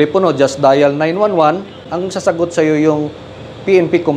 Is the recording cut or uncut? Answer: cut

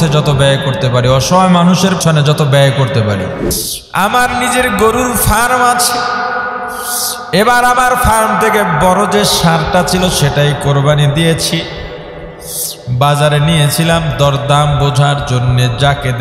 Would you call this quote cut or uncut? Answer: cut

